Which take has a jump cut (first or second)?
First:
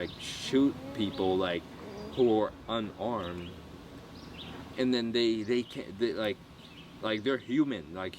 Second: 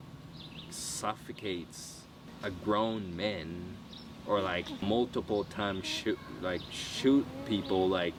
first